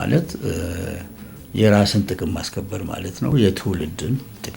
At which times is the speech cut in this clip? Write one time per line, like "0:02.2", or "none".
0:03.3